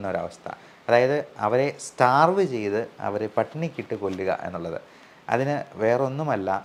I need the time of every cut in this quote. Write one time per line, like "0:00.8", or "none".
none